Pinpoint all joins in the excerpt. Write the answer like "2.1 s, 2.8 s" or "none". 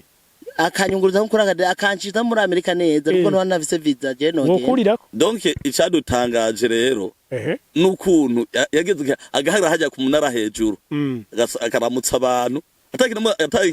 5.1 s